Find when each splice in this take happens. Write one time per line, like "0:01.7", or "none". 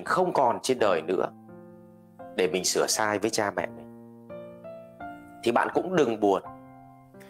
0:03.8
0:05.4